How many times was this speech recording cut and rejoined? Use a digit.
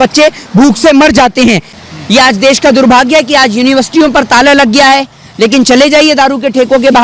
1